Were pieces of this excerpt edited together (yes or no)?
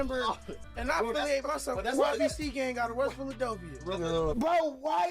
no